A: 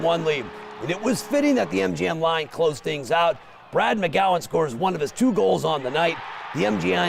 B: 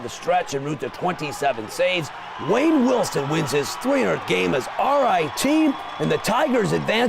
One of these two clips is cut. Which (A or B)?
B